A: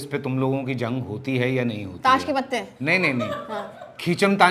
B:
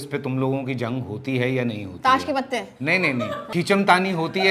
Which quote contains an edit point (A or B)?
B